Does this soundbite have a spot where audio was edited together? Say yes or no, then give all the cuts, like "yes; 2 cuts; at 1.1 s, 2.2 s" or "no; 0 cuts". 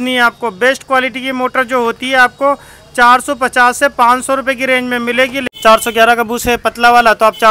yes; 1 cut; at 5.4 s